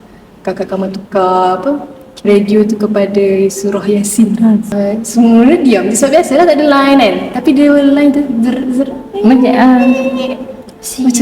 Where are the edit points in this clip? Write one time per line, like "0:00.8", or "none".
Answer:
0:04.7